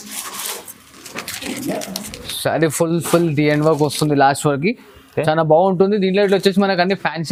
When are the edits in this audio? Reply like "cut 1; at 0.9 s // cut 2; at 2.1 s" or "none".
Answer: none

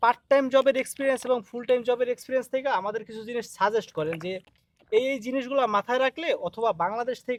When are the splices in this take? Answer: none

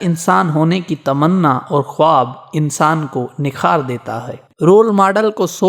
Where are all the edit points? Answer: cut 1; at 4.4 s

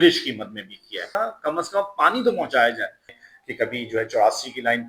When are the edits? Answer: cut 1; at 1.1 s // cut 2; at 3.1 s

